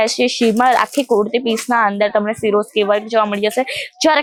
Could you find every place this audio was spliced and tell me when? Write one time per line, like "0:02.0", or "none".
none